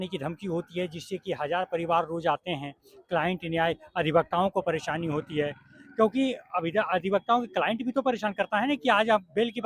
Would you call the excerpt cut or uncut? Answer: uncut